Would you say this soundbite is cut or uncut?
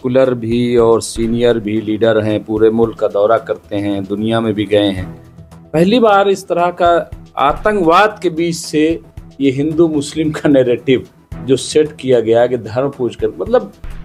uncut